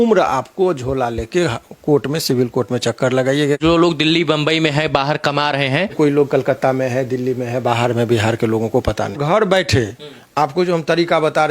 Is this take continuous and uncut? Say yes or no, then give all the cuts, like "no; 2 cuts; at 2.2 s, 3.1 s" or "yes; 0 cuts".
no; 3 cuts; at 3.6 s, 6.0 s, 9.2 s